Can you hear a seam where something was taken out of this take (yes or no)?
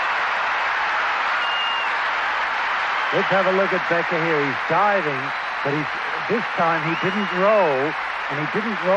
yes